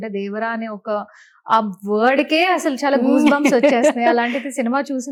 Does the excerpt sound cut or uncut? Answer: uncut